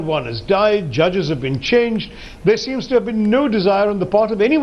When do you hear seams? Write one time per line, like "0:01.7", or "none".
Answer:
none